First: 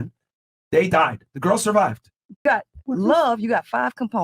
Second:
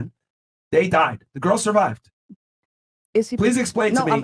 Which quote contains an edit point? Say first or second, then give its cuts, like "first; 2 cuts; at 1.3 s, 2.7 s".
first; 1 cut; at 2.4 s